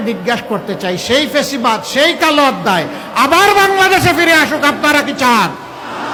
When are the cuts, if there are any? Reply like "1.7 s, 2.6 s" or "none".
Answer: none